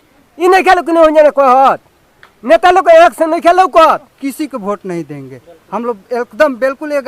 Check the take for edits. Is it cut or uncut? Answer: cut